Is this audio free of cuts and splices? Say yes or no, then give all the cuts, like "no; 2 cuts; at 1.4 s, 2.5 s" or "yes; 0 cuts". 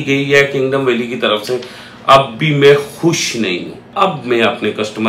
no; 1 cut; at 3.9 s